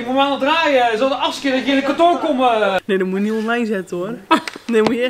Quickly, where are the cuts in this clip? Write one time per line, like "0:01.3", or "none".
0:02.8